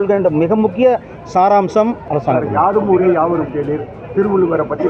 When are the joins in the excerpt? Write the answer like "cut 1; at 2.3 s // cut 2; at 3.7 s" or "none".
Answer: cut 1; at 2.1 s